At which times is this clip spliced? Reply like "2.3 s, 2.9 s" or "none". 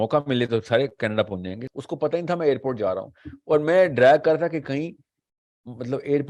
1.7 s

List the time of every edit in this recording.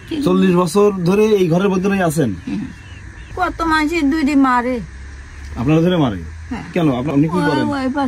3.2 s, 7.1 s

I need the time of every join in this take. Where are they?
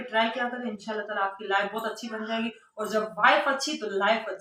none

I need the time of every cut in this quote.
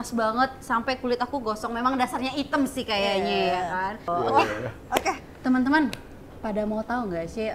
4.1 s

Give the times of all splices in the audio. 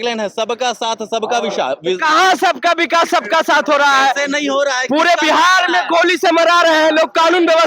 none

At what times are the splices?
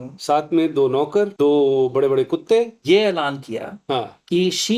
1.3 s, 2.8 s

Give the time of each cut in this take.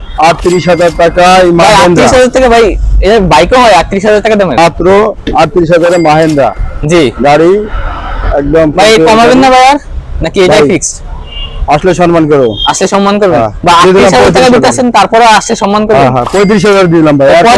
none

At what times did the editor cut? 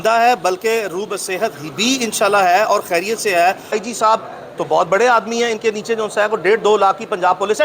3.8 s

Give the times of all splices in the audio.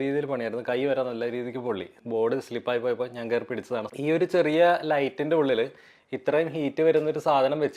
1.9 s, 3.9 s

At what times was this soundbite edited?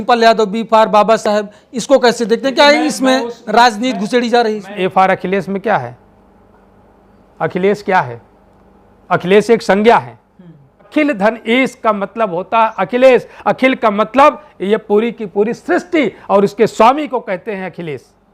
4.7 s, 10.9 s

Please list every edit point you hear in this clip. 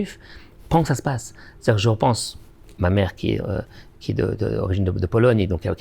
none

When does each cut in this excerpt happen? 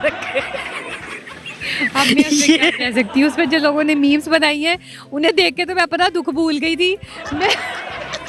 none

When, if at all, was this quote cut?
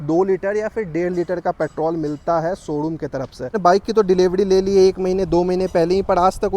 3.6 s

